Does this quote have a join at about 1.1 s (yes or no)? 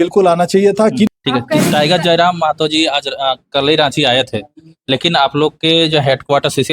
yes